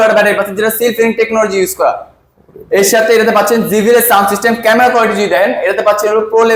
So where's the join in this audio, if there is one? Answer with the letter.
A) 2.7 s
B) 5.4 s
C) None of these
C